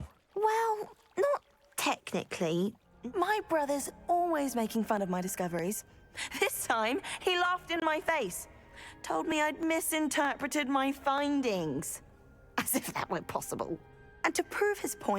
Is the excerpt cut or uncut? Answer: cut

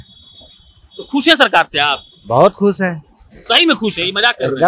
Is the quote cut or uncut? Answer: uncut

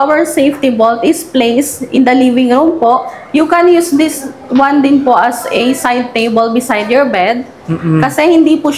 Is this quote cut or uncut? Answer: uncut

